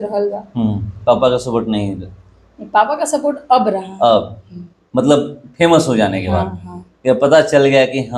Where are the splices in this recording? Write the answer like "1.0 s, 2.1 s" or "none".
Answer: none

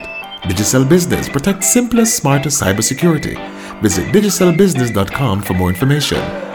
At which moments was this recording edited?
none

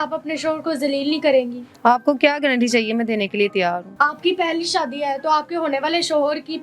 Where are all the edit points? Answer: none

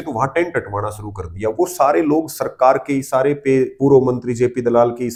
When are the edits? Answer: none

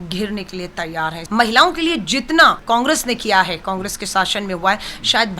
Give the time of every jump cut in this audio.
1.2 s, 2.6 s

